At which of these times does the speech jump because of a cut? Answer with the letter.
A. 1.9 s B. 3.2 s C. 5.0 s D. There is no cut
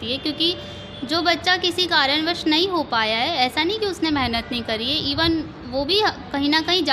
D